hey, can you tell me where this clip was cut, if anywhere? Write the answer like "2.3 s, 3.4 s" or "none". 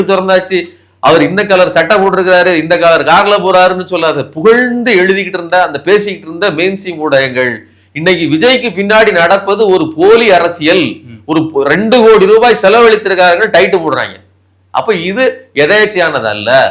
none